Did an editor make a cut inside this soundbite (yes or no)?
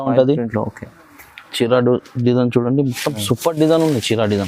no